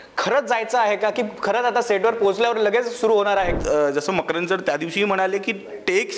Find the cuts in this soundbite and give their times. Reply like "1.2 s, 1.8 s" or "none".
3.5 s